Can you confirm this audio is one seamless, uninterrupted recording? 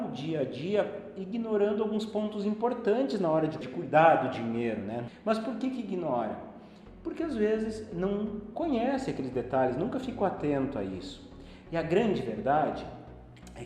no; 2 cuts; at 3.6 s, 5.1 s

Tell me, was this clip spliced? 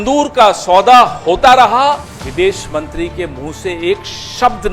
yes; 1 cut; at 2.2 s

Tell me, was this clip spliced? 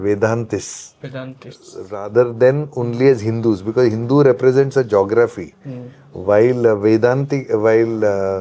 no; 0 cuts

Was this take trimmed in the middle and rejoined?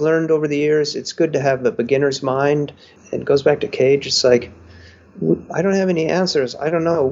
yes; 1 cut; at 3.0 s

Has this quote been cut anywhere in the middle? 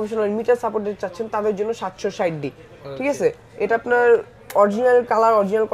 no; 0 cuts

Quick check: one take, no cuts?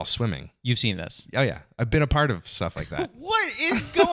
yes; 0 cuts

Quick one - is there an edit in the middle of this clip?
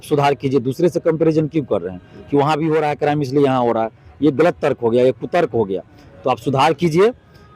no; 0 cuts

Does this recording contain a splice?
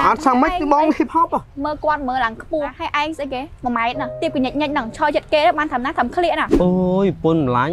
yes; 4 cuts; at 1.5 s, 2.8 s, 4.1 s, 6.5 s

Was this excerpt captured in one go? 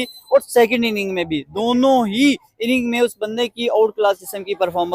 yes; 0 cuts

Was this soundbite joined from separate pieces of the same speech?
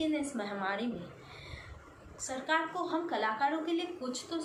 no; 0 cuts

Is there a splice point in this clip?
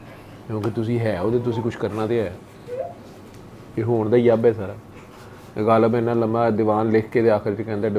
no; 0 cuts

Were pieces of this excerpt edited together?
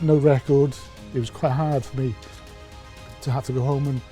yes; 1 cut; at 1.0 s

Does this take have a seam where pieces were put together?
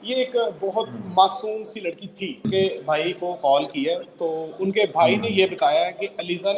yes; 1 cut; at 2.4 s

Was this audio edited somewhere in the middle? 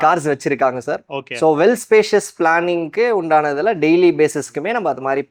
no; 0 cuts

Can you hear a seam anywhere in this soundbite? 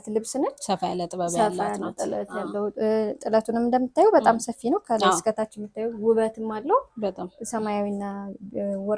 no; 0 cuts

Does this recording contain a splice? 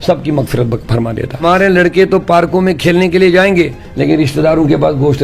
yes; 1 cut; at 1.4 s

